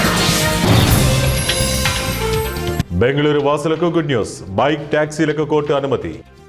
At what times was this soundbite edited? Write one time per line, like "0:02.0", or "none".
0:02.8